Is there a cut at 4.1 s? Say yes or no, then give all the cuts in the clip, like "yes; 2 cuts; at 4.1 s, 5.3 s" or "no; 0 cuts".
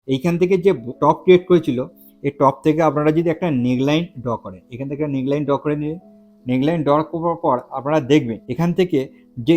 no; 2 cuts; at 0.9 s, 8.4 s